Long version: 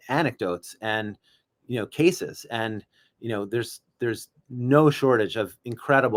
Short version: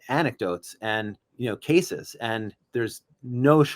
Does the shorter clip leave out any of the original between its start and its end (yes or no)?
yes